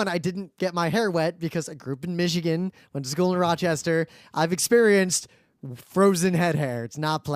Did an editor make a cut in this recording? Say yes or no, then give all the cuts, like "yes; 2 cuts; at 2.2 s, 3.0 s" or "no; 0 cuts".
yes; 1 cut; at 3.6 s